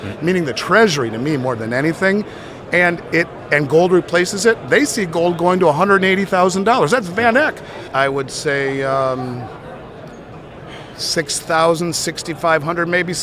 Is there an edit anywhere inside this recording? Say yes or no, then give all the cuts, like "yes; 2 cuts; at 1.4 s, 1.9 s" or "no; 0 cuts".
yes; 1 cut; at 7.8 s